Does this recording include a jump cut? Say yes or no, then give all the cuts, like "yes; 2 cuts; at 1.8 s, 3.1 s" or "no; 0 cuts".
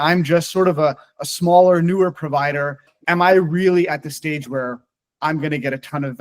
yes; 1 cut; at 2.9 s